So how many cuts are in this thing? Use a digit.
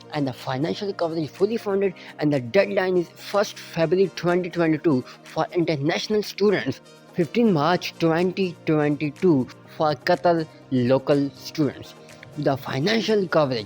2